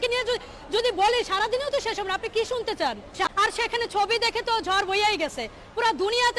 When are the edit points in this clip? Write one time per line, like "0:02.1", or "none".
none